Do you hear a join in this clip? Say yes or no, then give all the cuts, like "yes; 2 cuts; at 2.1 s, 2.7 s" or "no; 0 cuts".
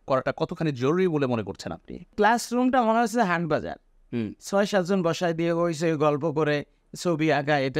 yes; 1 cut; at 2.1 s